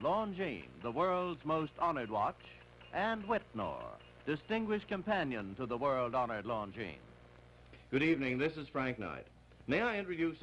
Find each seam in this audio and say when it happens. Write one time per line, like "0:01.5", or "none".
0:01.3